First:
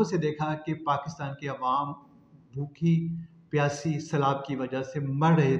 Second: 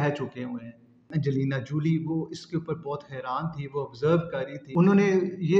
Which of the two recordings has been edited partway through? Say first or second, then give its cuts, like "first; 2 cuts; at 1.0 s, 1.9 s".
second; 2 cuts; at 1.1 s, 4.6 s